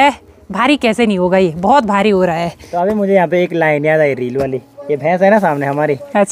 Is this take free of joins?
yes; 0 cuts

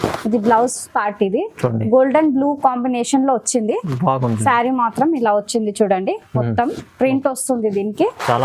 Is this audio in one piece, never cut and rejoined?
yes; 0 cuts

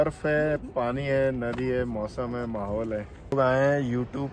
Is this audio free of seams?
no; 1 cut; at 3.3 s

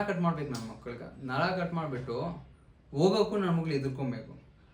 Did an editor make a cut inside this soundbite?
no; 0 cuts

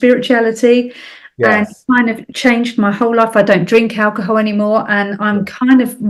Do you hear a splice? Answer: no; 0 cuts

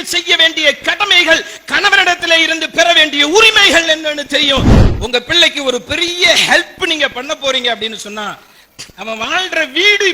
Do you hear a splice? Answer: yes; 1 cut; at 4.8 s

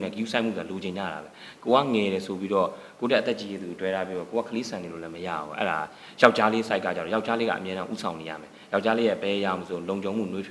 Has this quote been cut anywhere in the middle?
no; 0 cuts

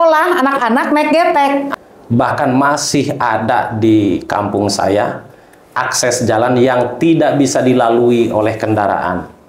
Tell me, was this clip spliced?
yes; 1 cut; at 1.7 s

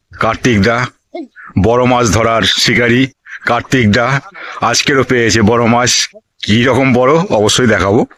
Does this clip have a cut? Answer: no; 0 cuts

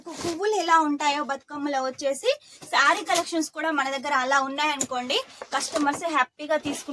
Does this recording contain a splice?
no; 0 cuts

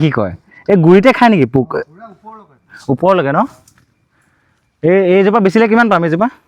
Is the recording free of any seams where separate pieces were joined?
yes; 0 cuts

